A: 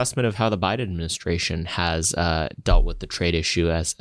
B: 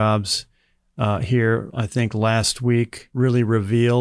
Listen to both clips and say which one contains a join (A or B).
B